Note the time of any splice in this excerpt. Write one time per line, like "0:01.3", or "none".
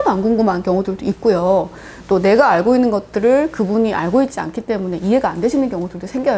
none